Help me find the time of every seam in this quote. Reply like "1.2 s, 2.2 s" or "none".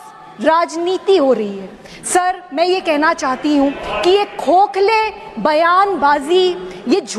none